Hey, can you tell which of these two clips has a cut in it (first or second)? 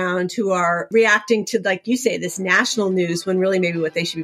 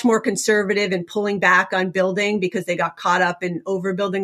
first